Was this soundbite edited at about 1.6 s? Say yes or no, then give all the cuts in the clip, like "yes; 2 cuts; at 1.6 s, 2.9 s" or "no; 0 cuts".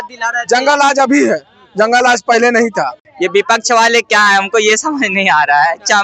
no; 1 cut; at 3.0 s